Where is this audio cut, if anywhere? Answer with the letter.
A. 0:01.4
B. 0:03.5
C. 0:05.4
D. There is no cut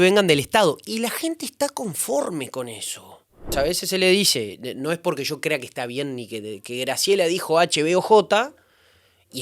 B